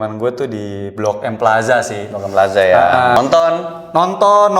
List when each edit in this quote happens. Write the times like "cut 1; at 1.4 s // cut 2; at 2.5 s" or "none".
cut 1; at 3.1 s

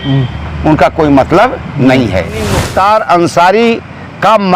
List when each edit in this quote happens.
cut 1; at 2.7 s

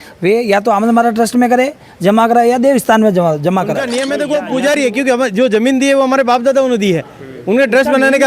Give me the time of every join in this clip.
cut 1; at 4.2 s

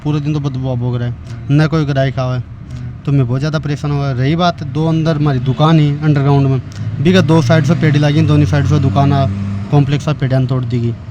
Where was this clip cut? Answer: none

